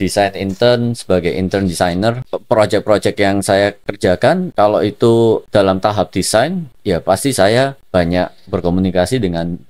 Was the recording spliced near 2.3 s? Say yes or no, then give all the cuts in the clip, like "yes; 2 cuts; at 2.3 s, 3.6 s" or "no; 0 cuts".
yes; 5 cuts; at 2.3 s, 4.0 s, 5.4 s, 6.7 s, 7.8 s